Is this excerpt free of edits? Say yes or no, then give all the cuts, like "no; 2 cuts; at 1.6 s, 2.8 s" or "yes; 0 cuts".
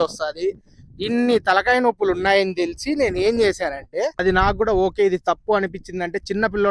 no; 1 cut; at 4.2 s